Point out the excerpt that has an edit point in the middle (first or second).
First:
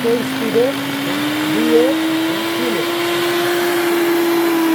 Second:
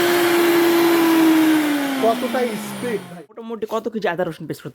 second